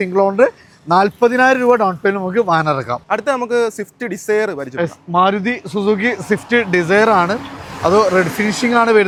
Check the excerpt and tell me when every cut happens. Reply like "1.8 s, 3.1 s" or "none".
none